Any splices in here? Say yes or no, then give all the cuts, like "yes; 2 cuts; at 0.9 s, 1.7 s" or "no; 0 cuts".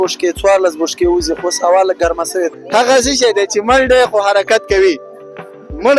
yes; 1 cut; at 2.6 s